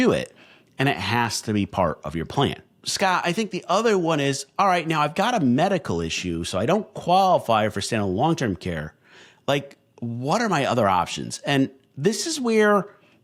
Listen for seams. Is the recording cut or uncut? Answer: uncut